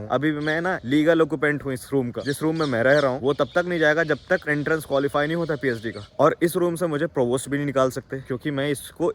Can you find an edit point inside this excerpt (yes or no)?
no